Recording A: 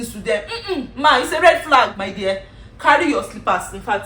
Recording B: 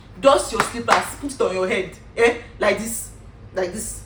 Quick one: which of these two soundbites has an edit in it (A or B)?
A